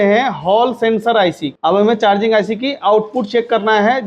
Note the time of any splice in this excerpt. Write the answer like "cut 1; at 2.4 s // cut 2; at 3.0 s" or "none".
cut 1; at 1.5 s